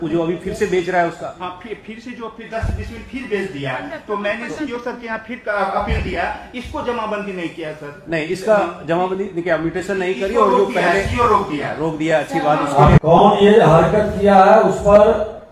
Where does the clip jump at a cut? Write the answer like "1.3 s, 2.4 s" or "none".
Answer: 13.0 s